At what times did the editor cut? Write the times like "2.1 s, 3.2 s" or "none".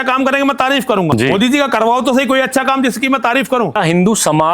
1.1 s, 3.8 s